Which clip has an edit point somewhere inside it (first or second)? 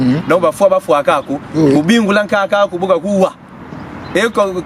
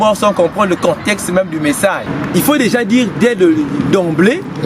second